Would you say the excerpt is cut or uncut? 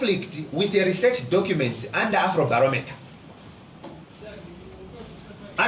cut